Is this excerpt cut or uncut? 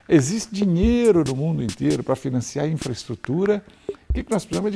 cut